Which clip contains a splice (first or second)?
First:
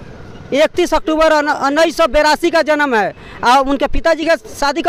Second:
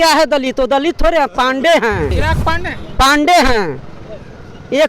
second